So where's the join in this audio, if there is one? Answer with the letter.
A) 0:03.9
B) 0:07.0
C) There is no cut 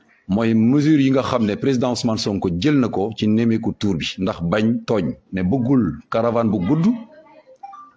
C